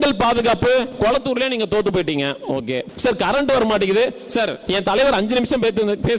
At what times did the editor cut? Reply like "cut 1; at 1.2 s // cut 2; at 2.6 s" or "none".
cut 1; at 0.9 s // cut 2; at 2.9 s // cut 3; at 4.6 s